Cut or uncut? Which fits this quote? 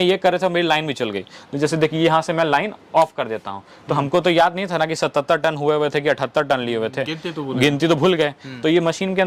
uncut